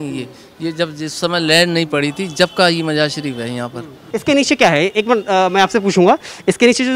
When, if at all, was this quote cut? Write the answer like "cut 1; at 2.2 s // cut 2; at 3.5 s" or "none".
cut 1; at 4.0 s